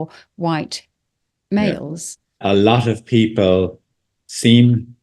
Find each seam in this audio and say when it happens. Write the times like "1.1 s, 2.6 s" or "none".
2.4 s